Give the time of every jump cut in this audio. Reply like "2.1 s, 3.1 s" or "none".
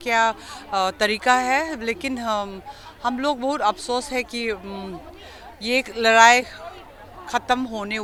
none